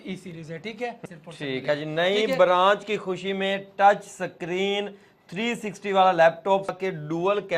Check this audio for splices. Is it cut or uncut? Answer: cut